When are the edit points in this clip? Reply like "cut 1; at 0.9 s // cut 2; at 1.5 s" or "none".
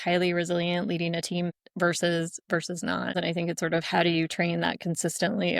cut 1; at 1.6 s // cut 2; at 3.2 s